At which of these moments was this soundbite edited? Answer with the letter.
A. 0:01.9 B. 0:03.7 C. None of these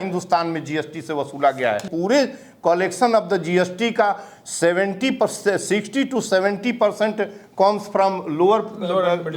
A